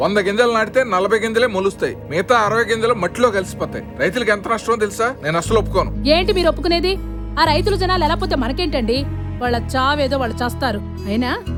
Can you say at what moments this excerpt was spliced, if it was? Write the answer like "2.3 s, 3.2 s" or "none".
none